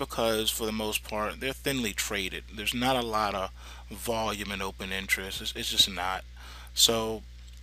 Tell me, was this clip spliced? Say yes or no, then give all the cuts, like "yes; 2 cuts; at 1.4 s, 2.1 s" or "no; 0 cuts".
yes; 1 cut; at 5.1 s